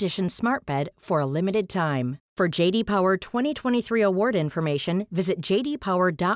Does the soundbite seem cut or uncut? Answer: uncut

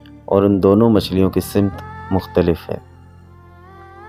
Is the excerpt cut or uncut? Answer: uncut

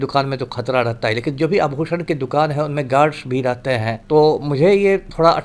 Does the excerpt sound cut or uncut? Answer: cut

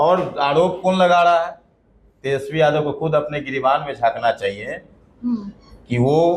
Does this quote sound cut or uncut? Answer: uncut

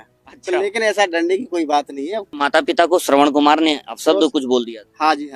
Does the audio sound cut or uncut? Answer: cut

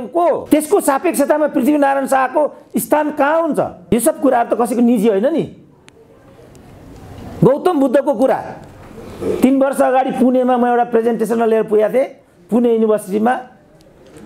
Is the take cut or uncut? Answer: uncut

